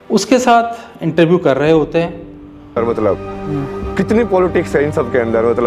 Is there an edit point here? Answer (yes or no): no